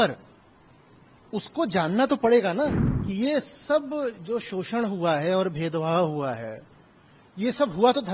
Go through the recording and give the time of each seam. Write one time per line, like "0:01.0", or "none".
0:02.8